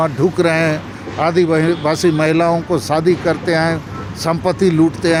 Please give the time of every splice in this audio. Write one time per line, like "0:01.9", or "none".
none